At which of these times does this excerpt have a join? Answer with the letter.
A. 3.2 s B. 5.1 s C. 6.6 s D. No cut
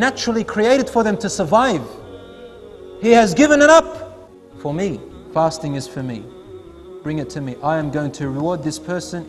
B